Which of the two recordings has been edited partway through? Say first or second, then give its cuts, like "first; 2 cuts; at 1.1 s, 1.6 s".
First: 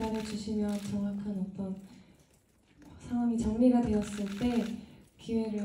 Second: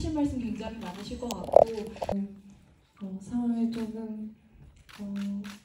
second; 1 cut; at 2.1 s